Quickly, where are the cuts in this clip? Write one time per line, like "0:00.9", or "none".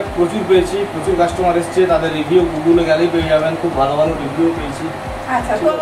none